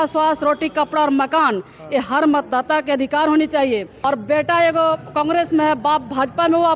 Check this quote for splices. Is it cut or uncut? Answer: cut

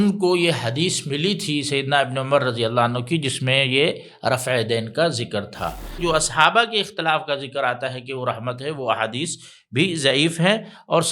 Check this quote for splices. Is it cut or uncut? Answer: cut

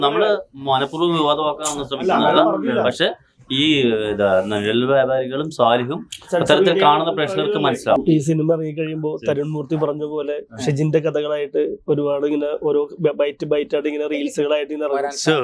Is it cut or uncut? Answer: cut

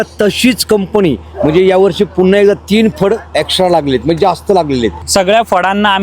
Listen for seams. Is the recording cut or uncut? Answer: cut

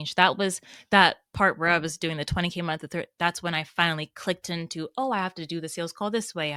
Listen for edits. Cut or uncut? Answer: uncut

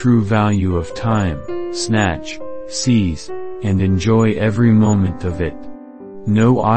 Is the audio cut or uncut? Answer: uncut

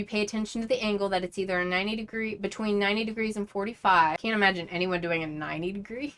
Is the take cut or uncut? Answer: cut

